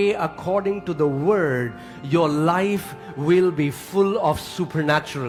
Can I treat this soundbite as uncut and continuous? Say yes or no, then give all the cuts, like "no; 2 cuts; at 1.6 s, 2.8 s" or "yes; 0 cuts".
yes; 0 cuts